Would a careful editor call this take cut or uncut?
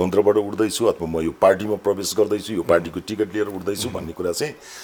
uncut